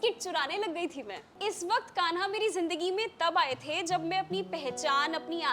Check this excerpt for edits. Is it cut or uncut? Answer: cut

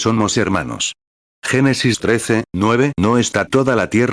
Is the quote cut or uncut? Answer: uncut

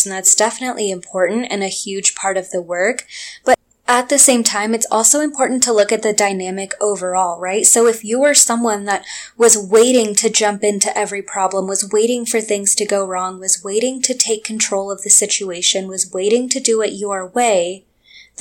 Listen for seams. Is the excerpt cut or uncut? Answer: uncut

